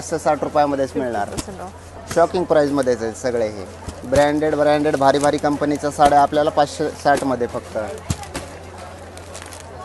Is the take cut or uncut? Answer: uncut